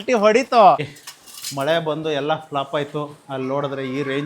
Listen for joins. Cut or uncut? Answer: cut